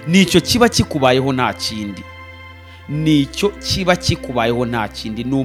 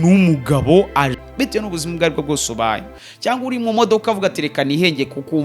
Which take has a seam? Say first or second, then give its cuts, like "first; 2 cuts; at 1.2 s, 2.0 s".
second; 1 cut; at 1.2 s